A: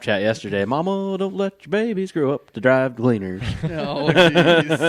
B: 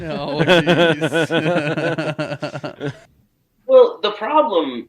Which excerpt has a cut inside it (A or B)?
B